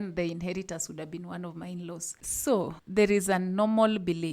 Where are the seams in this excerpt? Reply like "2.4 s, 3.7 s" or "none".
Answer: 2.2 s